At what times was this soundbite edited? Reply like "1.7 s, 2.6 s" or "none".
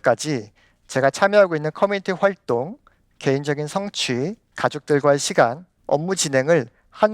4.5 s, 5.7 s